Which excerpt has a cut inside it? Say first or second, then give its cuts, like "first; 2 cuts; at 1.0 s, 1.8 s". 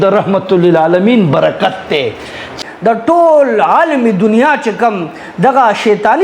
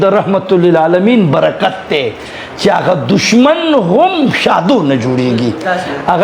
first; 1 cut; at 2.5 s